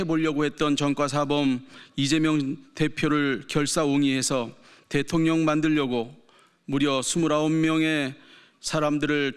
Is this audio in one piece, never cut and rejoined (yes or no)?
yes